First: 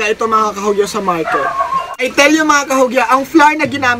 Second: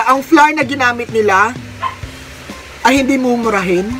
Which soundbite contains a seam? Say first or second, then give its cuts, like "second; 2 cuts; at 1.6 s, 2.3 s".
first; 1 cut; at 2.0 s